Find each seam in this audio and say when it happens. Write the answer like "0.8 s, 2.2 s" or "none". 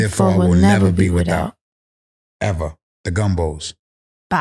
2.9 s